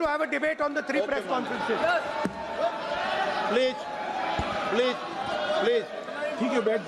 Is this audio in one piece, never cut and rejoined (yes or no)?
yes